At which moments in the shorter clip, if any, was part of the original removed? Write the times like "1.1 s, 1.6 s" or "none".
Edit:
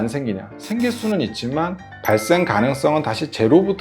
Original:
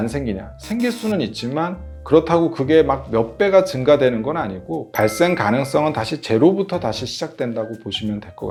1.9 s